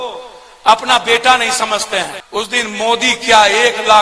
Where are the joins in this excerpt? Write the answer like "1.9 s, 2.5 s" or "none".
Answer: 2.2 s